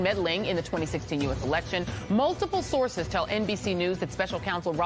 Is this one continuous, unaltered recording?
yes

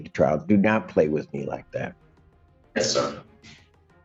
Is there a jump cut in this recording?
no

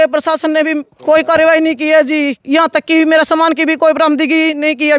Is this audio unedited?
no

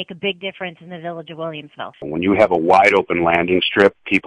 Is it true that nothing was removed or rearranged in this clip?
no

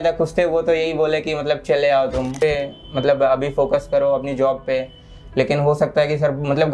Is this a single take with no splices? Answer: no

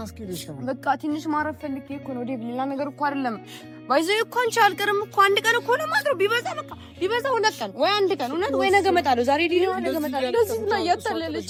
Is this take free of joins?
yes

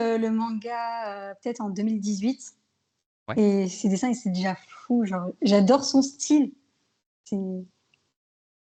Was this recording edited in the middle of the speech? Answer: no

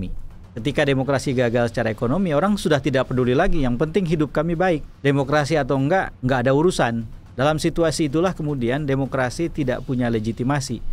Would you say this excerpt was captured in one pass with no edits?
yes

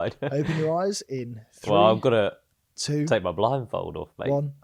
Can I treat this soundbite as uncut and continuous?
yes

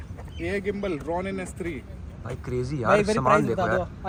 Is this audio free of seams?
yes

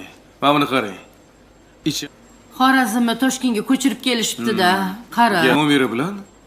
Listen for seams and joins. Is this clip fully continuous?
yes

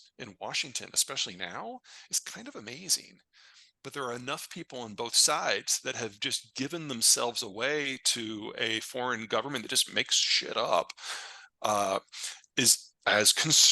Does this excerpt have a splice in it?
no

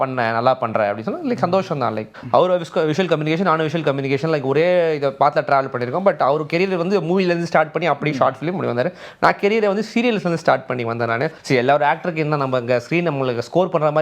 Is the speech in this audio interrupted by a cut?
yes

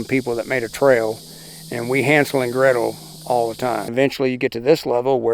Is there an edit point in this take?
yes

